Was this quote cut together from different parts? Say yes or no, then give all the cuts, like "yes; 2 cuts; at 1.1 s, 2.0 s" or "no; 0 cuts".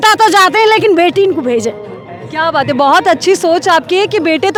no; 0 cuts